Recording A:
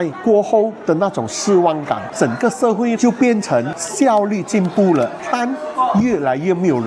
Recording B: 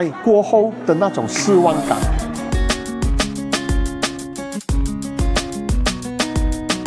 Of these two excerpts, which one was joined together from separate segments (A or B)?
A